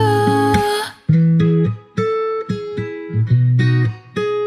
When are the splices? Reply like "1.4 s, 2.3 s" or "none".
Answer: 0.9 s